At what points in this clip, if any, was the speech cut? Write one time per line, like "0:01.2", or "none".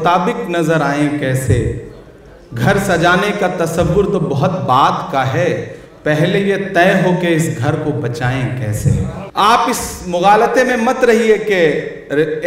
0:09.2